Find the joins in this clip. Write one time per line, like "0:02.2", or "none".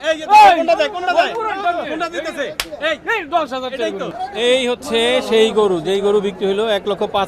0:04.1